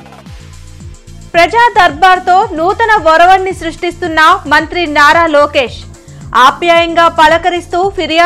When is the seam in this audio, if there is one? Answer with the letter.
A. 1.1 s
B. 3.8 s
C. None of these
A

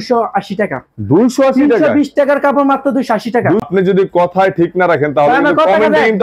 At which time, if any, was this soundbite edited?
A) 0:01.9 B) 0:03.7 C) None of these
B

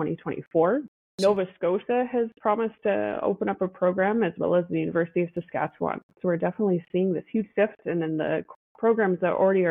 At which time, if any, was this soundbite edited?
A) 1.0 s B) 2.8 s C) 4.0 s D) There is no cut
A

